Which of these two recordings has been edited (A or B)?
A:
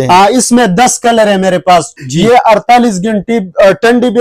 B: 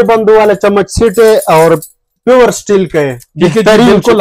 A